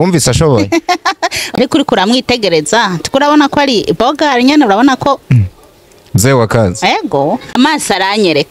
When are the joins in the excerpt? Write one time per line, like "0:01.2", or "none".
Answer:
0:01.4
0:07.4